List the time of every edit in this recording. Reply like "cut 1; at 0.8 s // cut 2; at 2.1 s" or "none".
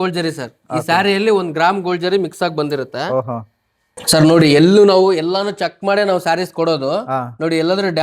none